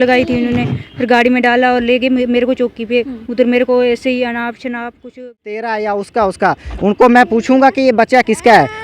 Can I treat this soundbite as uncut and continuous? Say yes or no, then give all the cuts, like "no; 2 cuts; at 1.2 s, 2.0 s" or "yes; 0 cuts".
no; 1 cut; at 5.2 s